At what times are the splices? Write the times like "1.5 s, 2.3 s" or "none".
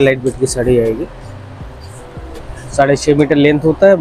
none